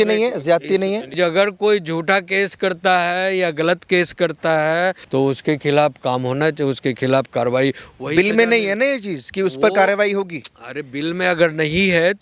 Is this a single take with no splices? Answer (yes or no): no